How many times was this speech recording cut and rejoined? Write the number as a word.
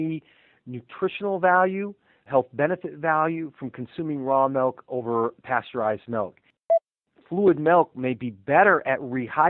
two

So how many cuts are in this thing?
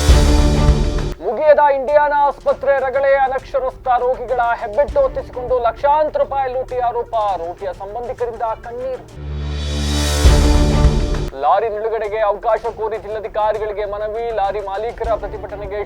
one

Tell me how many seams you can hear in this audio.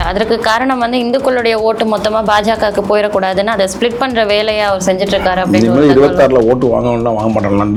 zero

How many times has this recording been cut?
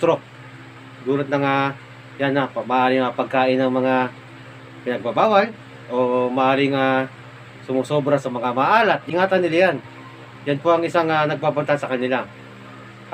zero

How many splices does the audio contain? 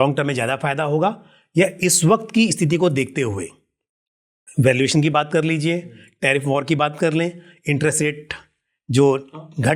zero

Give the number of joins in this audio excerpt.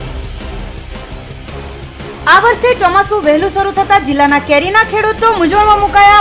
one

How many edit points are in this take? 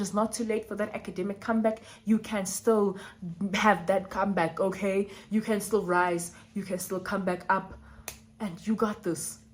zero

